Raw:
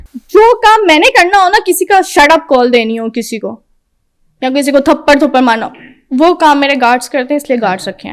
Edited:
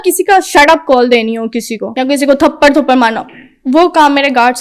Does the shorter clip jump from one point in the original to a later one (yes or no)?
yes